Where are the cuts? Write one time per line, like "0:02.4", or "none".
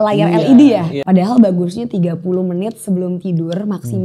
0:00.9